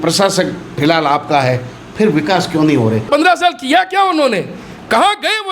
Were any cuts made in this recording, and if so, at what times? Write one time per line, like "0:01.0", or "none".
0:03.1